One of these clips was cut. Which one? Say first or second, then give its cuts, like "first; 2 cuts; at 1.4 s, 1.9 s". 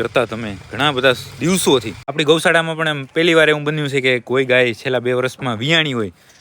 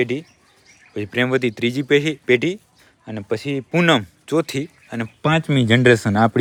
first; 1 cut; at 2.0 s